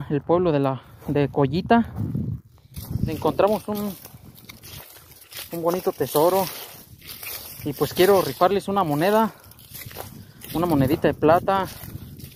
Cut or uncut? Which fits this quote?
cut